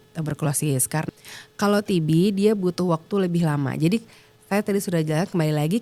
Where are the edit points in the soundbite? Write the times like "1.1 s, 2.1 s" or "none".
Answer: 1.0 s